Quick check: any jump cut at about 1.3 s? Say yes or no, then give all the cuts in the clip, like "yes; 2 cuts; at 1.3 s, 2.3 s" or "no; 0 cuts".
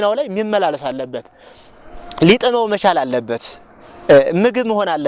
no; 0 cuts